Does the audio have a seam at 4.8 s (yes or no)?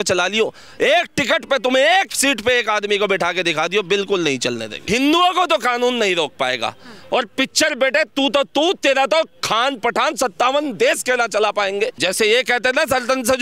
yes